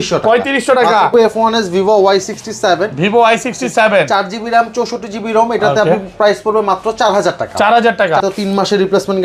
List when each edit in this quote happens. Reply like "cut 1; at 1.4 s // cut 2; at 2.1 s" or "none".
cut 1; at 1.1 s // cut 2; at 8.2 s